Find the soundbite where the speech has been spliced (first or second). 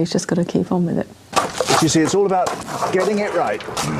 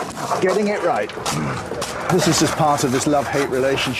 first